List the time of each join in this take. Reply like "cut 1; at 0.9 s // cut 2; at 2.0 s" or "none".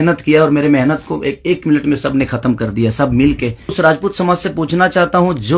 cut 1; at 3.7 s